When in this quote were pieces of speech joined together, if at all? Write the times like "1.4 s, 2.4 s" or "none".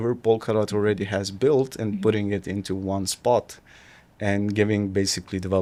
none